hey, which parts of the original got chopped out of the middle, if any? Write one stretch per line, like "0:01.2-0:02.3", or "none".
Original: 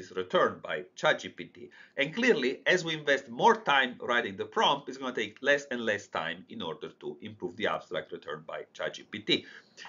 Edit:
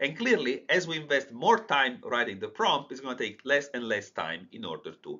none